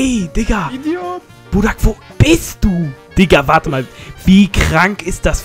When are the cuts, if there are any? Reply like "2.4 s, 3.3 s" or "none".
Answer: 3.0 s